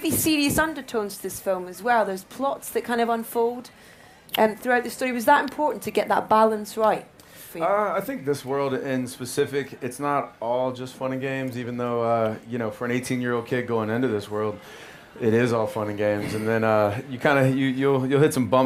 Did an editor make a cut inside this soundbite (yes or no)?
no